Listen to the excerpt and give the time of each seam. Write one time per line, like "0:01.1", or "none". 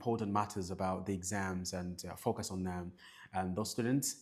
0:03.0